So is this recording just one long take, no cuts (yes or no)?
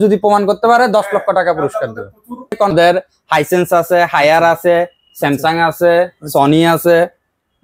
no